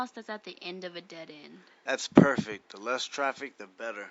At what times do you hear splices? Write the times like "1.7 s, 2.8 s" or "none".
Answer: 3.1 s